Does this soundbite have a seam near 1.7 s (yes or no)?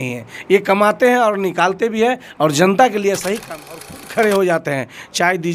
no